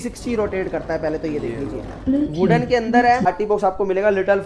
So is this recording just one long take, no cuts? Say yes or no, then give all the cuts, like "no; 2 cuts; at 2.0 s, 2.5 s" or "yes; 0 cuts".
no; 1 cut; at 3.3 s